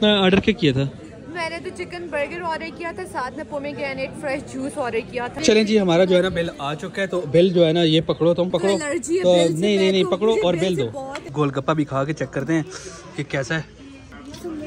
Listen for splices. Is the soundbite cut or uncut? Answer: cut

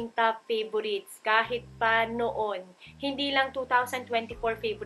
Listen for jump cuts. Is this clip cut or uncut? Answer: uncut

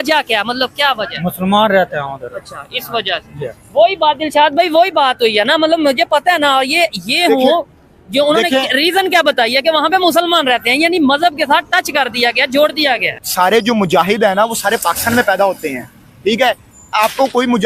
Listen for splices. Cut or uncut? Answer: cut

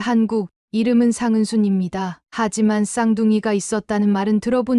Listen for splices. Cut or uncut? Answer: uncut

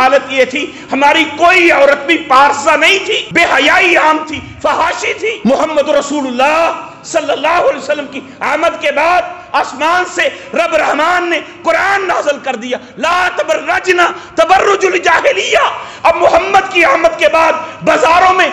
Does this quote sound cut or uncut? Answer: cut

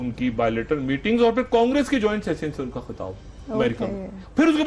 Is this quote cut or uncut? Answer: uncut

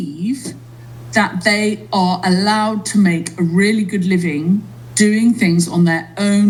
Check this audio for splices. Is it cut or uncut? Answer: uncut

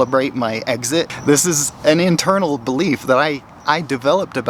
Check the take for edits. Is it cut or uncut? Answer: cut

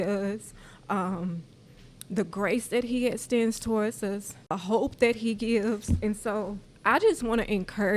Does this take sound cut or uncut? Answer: cut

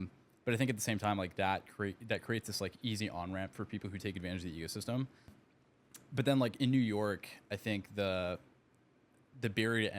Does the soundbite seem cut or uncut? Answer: cut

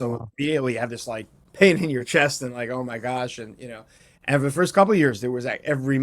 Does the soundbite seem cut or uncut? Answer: cut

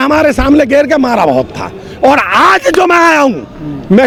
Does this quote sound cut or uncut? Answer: uncut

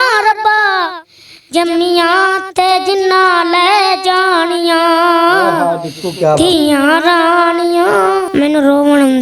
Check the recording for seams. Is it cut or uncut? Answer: cut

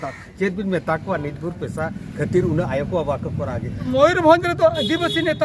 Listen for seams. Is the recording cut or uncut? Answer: cut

